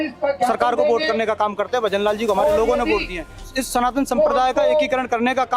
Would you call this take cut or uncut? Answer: cut